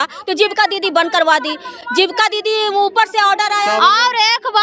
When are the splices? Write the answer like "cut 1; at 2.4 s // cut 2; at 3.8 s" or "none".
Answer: none